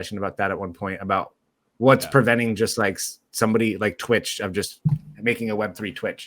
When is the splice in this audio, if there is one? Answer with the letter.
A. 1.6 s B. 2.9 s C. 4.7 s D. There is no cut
C